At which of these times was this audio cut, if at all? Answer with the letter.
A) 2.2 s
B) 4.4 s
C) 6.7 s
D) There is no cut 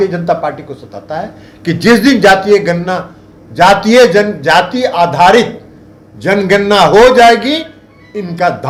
D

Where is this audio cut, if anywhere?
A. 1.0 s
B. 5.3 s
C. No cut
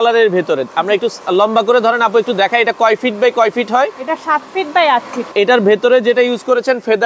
B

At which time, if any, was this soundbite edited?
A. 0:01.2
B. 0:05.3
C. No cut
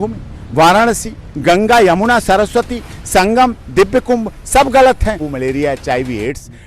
B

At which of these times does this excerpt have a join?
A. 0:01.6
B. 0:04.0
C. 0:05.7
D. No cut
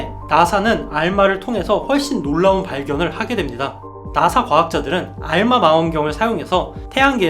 B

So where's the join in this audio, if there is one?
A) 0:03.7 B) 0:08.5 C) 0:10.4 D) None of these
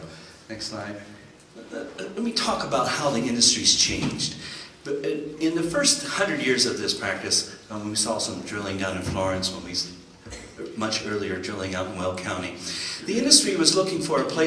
D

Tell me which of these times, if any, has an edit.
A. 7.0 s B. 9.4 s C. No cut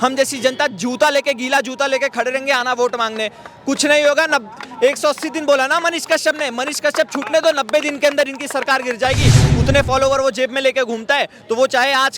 B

